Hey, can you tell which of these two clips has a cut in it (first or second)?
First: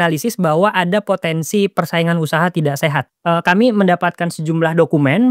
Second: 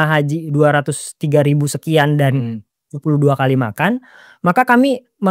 first